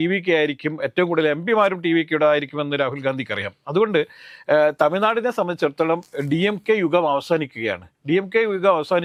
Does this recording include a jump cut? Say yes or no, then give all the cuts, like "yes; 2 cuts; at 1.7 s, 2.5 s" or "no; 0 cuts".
no; 0 cuts